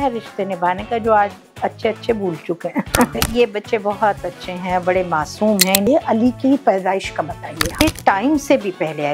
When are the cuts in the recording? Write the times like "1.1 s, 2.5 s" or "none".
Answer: 3.1 s, 5.9 s, 7.8 s